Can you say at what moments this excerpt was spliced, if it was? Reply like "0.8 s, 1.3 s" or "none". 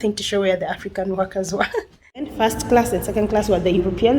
2.3 s